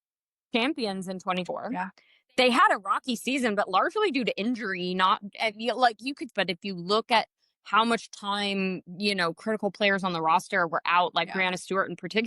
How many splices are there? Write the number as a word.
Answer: two